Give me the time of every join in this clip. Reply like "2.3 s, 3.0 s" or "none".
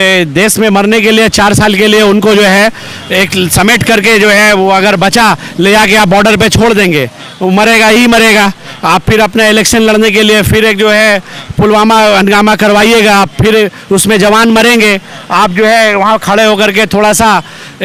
none